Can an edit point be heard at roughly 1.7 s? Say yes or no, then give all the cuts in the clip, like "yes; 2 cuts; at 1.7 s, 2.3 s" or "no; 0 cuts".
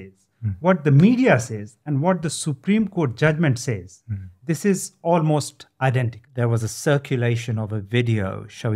no; 1 cut; at 6.2 s